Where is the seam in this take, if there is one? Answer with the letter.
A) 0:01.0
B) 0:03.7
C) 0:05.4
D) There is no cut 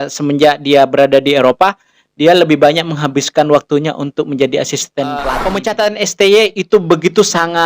C